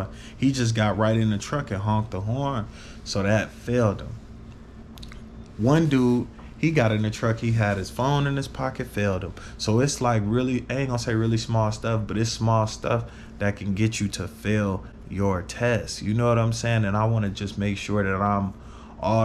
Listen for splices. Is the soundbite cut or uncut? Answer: uncut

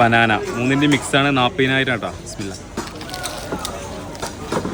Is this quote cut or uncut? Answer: uncut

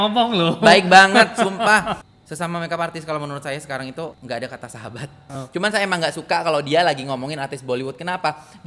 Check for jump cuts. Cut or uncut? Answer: cut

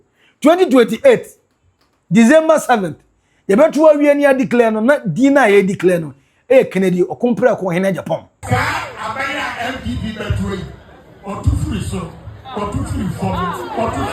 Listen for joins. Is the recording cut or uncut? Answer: cut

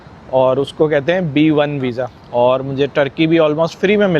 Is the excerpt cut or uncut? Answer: cut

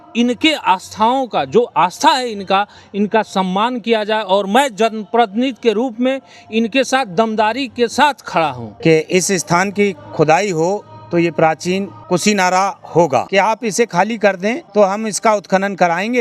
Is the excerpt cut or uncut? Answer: cut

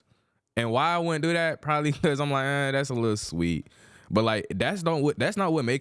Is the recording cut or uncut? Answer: uncut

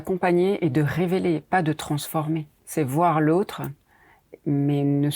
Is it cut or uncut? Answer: cut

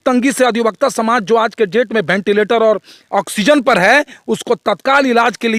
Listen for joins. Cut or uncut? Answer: uncut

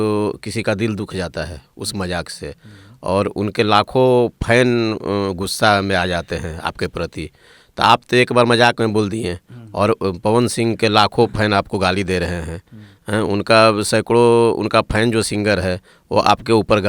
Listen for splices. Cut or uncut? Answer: uncut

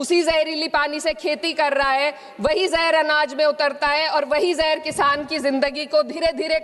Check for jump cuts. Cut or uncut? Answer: uncut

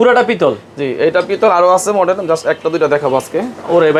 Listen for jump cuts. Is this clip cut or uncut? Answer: uncut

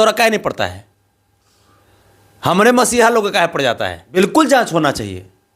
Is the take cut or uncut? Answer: cut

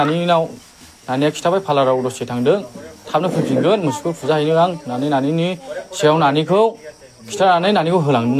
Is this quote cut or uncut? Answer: uncut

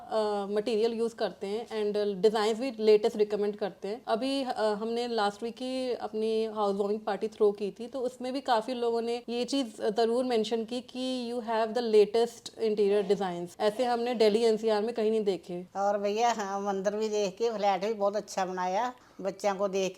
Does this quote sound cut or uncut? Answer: cut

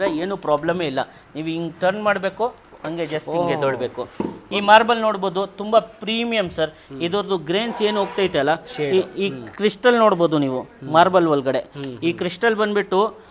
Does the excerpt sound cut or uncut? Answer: uncut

